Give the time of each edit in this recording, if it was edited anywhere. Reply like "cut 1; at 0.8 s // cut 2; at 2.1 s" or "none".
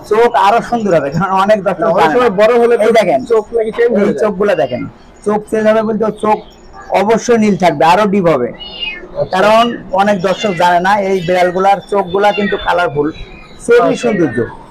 none